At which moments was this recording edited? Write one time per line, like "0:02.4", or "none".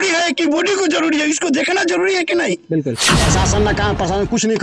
0:03.0

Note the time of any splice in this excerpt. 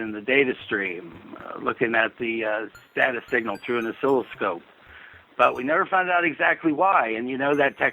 none

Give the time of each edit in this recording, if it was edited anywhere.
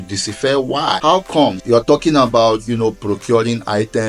0:01.0
0:01.6

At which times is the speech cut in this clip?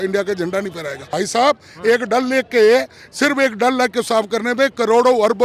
0:01.0

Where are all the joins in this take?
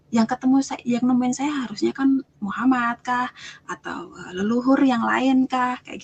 none

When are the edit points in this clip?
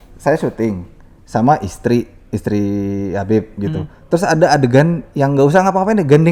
none

